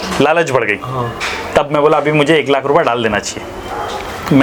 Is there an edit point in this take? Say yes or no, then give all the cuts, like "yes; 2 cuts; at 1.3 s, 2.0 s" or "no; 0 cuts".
no; 0 cuts